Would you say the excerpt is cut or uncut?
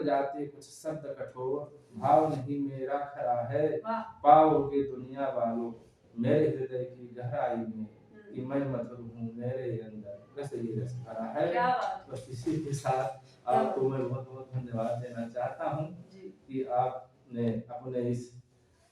uncut